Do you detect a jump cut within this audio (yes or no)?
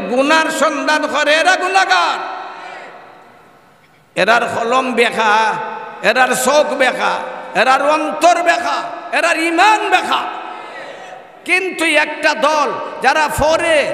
yes